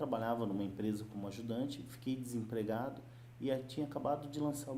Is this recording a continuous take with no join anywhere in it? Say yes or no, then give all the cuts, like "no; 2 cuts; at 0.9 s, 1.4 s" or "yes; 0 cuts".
yes; 0 cuts